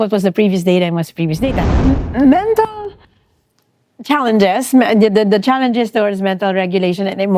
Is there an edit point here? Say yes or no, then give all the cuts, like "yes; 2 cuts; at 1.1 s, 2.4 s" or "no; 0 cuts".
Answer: yes; 1 cut; at 1.7 s